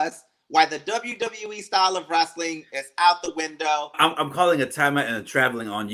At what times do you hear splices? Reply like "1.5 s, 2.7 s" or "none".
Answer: 3.9 s